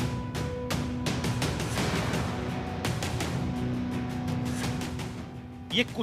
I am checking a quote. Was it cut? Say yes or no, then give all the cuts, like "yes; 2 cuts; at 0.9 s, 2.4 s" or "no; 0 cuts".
no; 0 cuts